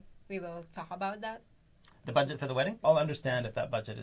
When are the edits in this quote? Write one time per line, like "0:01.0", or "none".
0:02.8